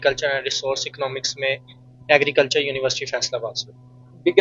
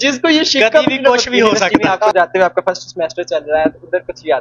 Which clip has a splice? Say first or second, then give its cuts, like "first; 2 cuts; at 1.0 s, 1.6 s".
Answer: second; 1 cut; at 2.0 s